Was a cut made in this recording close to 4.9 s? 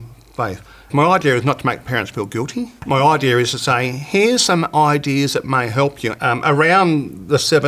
no; 3 cuts; at 0.9 s, 2.8 s, 6.1 s

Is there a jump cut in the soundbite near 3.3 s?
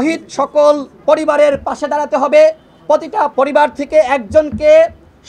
yes; 2 cuts; at 0.9 s, 3.3 s

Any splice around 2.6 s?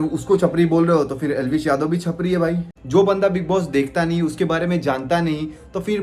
yes; 1 cut; at 2.6 s

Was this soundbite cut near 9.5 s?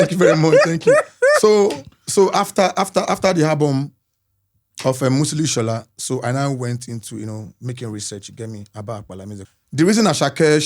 yes; 1 cut; at 9.5 s

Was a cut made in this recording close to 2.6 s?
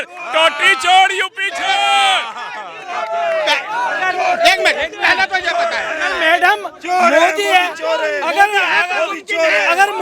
no; 0 cuts

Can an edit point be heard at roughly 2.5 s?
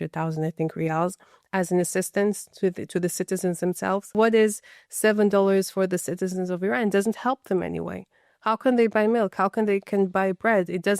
no; 1 cut; at 4.1 s

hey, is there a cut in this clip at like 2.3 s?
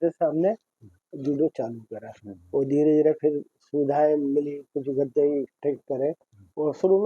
no; 0 cuts

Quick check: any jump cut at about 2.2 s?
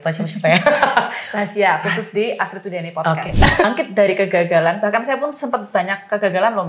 no; 1 cut; at 3.6 s

